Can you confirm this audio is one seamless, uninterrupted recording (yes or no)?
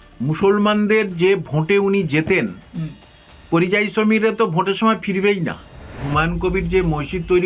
no